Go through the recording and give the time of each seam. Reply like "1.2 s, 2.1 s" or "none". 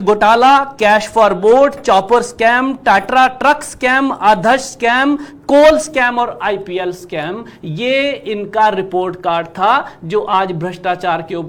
none